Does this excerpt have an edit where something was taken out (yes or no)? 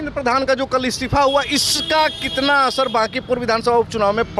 no